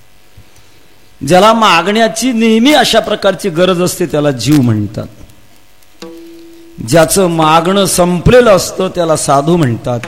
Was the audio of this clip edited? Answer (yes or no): no